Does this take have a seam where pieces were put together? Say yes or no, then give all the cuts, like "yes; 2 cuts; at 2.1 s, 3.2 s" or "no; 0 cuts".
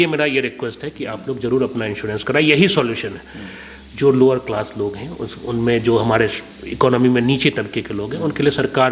no; 0 cuts